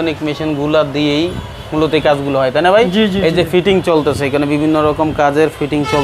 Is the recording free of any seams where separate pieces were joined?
yes; 0 cuts

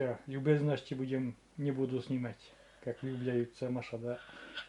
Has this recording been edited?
no; 0 cuts

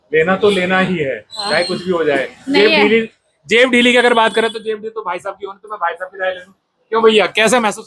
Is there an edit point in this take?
no; 0 cuts

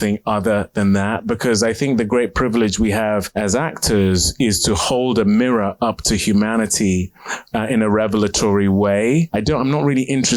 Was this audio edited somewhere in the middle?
yes; 2 cuts; at 3.3 s, 9.3 s

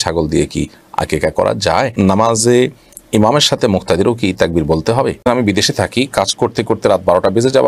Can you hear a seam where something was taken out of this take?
yes; 2 cuts; at 1.9 s, 5.3 s

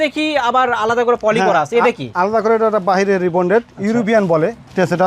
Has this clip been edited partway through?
no; 0 cuts

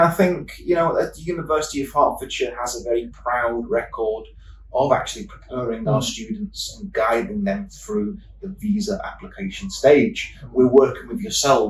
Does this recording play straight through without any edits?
yes; 0 cuts

